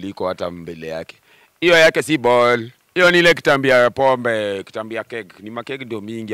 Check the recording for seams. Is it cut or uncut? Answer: uncut